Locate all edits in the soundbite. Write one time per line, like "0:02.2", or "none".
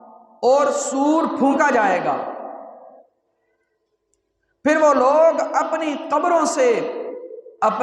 none